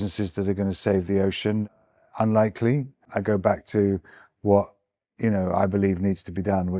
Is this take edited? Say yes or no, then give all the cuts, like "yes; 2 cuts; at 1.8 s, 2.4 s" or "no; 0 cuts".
no; 0 cuts